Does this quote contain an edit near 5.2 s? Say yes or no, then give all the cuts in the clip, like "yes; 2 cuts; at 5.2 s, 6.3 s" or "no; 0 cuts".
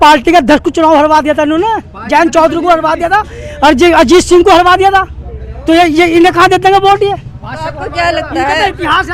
no; 0 cuts